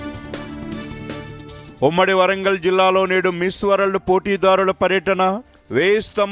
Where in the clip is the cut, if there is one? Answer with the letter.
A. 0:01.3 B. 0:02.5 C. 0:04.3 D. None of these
D